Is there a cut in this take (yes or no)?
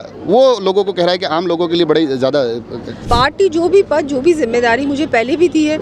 yes